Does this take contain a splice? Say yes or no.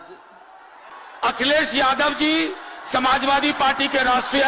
yes